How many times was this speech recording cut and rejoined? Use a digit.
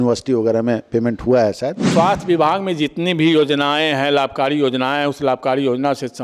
1